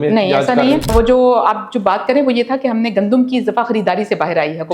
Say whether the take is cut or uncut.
cut